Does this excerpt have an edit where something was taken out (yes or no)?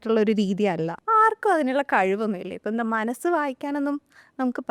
yes